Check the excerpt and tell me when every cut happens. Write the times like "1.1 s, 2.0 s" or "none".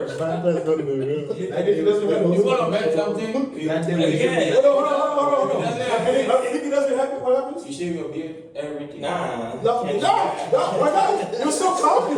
1.3 s